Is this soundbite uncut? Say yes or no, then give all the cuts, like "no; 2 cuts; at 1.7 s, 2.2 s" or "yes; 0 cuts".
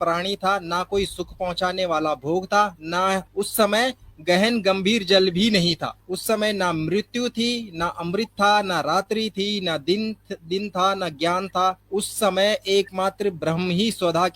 no; 3 cuts; at 3.3 s, 6.0 s, 11.8 s